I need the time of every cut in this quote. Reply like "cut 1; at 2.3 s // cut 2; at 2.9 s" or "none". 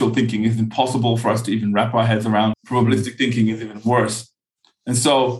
cut 1; at 2.5 s